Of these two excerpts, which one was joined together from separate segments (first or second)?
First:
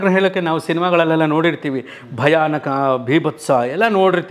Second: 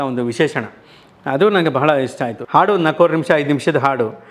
second